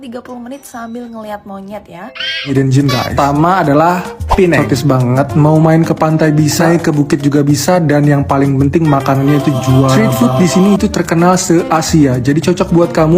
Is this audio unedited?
no; 1 cut; at 2.5 s

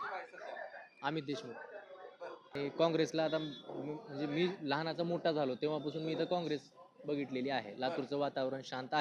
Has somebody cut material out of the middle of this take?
yes; 1 cut; at 2.4 s

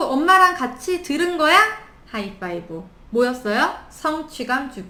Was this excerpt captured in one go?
yes; 0 cuts

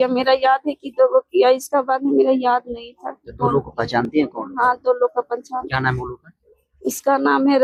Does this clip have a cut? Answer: no; 0 cuts

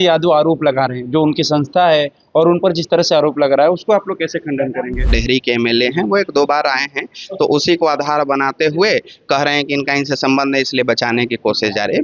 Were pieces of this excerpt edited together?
yes; 1 cut; at 5.2 s

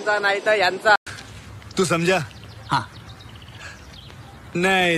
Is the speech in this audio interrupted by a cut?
yes; 1 cut; at 1.0 s

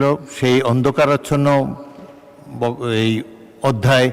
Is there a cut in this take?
no; 0 cuts

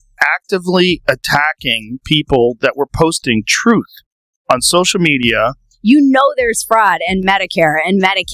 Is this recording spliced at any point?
yes; 1 cut; at 5.7 s

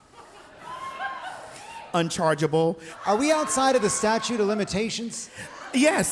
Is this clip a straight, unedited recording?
no; 1 cut; at 2.9 s

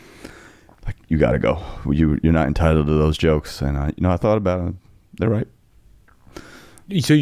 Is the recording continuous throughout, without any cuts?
yes; 0 cuts

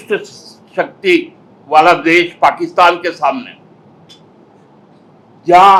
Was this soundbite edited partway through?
no; 0 cuts

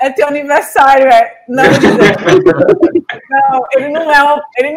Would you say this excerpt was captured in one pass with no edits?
yes; 0 cuts

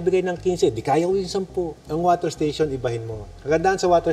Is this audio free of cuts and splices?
no; 1 cut; at 1.8 s

